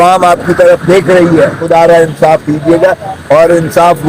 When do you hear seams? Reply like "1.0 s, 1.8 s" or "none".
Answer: 1.6 s